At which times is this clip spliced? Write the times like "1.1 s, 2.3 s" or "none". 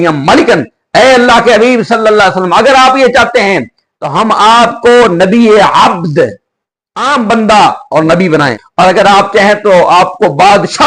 8.6 s